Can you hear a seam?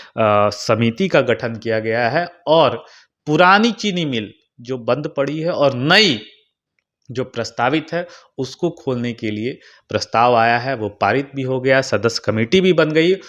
no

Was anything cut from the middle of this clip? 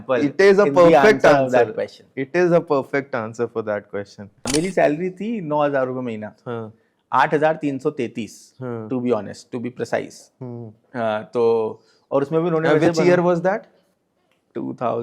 yes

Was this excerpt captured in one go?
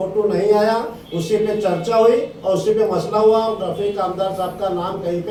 yes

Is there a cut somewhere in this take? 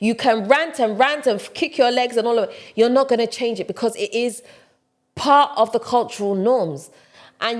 no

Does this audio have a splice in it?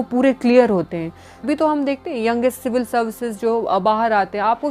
yes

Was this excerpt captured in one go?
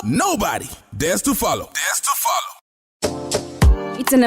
no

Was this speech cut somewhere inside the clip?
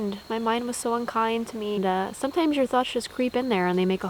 yes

